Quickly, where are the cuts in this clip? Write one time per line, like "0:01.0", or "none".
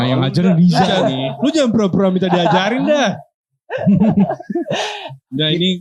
none